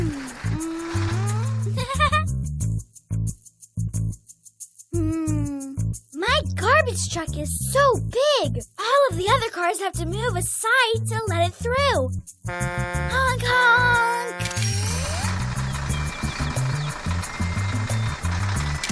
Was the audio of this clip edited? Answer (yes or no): yes